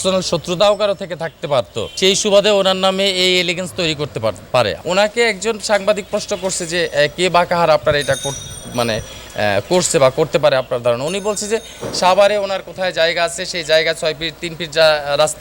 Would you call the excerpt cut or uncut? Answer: cut